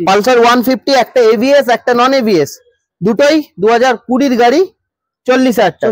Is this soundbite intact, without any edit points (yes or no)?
yes